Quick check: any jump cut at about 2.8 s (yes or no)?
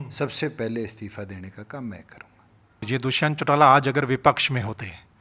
yes